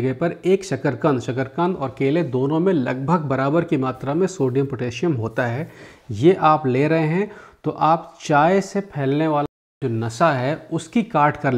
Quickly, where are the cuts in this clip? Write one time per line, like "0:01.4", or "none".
0:09.7